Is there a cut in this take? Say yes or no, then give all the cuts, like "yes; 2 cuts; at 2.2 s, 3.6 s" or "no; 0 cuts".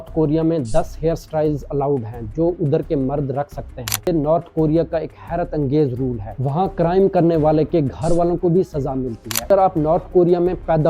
yes; 2 cuts; at 4.1 s, 9.5 s